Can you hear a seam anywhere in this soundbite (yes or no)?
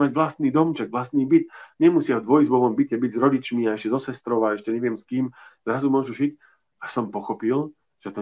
no